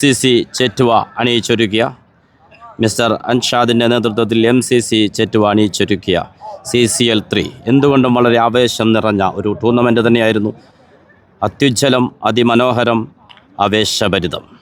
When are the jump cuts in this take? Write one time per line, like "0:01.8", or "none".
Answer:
none